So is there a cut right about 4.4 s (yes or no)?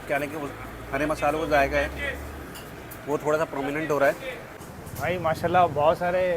yes